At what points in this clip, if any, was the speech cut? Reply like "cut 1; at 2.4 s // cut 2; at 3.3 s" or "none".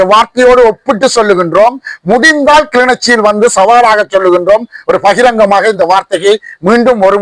none